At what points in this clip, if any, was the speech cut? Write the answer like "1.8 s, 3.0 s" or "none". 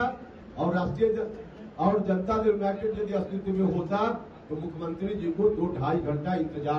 none